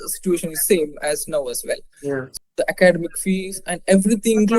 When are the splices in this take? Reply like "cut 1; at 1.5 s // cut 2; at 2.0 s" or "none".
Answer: cut 1; at 2.3 s

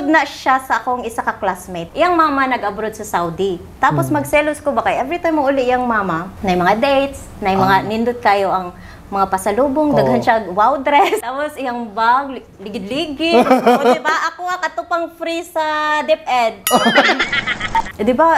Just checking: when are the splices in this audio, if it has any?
cut 1; at 1.8 s // cut 2; at 6.3 s // cut 3; at 11.2 s // cut 4; at 17.4 s

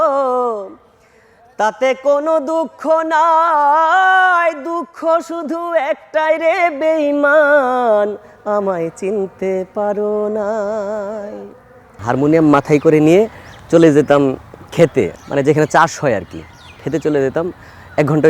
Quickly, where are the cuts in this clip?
cut 1; at 12.0 s // cut 2; at 15.2 s

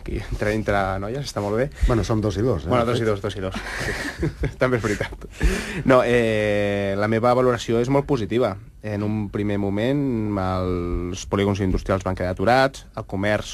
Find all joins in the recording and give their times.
cut 1; at 7.6 s

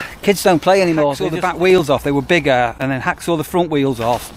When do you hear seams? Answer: cut 1; at 1.3 s

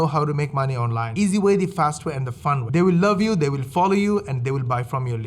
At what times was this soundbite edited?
cut 1; at 2.7 s

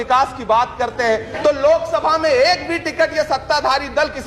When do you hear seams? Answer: cut 1; at 1.3 s

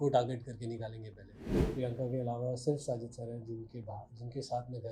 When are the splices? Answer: cut 1; at 1.5 s

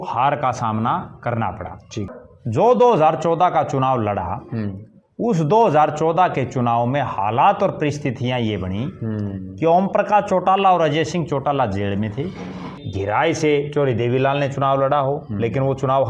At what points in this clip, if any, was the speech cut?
cut 1; at 2.2 s // cut 2; at 12.8 s

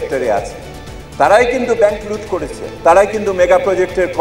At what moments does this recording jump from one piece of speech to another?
cut 1; at 2.7 s

